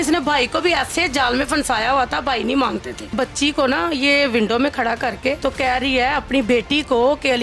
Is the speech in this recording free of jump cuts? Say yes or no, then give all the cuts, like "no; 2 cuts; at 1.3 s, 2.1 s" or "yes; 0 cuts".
no; 2 cuts; at 3.1 s, 5.4 s